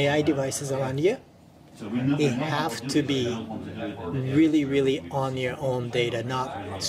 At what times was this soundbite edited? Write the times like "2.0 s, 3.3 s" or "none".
none